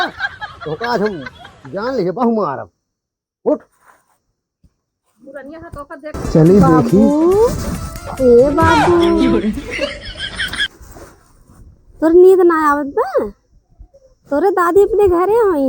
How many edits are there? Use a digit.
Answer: 1